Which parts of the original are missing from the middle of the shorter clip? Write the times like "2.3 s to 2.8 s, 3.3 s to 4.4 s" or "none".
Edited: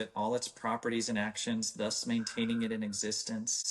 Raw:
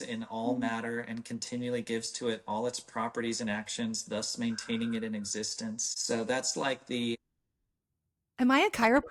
none